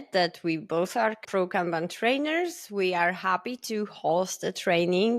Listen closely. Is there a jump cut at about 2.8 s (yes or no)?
no